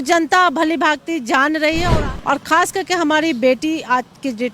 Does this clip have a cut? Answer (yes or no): yes